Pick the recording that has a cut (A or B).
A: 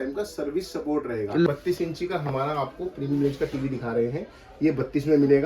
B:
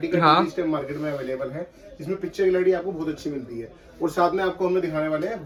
A